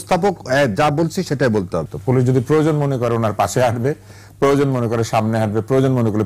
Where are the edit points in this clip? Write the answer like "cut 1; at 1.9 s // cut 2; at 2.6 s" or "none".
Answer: cut 1; at 1.9 s